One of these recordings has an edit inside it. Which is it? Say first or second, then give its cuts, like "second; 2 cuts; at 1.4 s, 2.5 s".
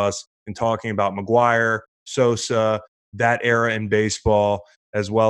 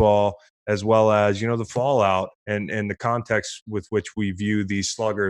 second; 1 cut; at 2.4 s